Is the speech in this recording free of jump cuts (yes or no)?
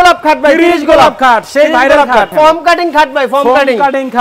no